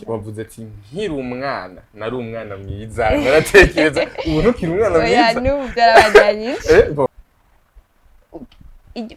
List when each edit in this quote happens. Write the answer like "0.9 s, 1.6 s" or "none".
7.1 s